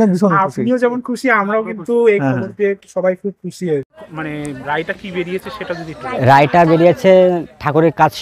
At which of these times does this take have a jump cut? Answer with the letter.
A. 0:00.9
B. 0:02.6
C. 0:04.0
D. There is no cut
C